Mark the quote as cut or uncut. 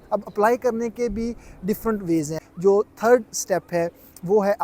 cut